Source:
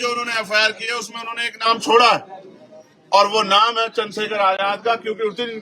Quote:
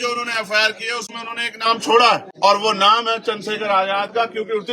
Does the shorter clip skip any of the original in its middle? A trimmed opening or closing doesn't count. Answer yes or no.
yes